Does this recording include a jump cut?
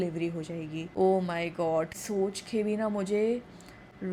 yes; 2 cuts; at 0.9 s, 2.0 s

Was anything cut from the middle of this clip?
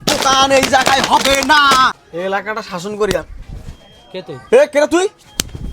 yes; 1 cut; at 1.9 s

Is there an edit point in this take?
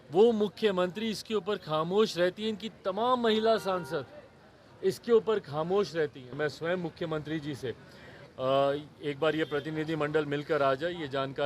yes; 1 cut; at 6.3 s

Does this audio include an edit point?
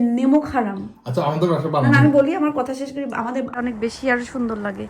yes; 1 cut; at 3.5 s

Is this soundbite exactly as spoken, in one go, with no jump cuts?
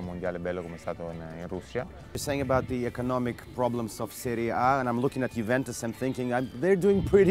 no; 1 cut; at 2.2 s

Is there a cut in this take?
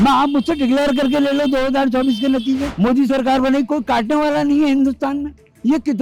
no; 0 cuts

